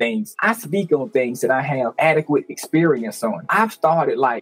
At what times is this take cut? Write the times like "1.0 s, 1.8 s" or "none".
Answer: none